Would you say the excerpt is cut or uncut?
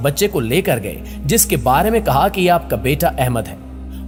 uncut